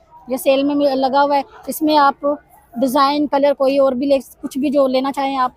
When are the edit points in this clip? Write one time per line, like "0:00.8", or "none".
none